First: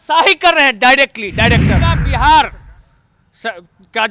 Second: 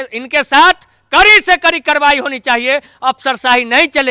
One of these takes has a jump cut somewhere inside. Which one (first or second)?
first